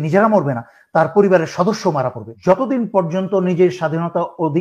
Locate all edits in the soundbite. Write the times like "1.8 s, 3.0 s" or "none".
2.3 s